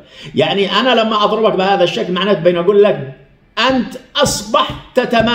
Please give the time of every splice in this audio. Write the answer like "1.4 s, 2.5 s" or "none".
none